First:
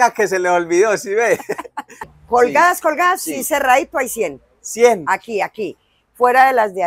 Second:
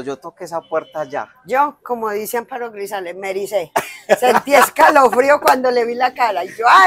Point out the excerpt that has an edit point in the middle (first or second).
first